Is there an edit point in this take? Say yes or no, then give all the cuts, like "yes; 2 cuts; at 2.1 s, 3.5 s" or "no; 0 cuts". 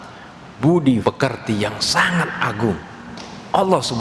yes; 1 cut; at 1.0 s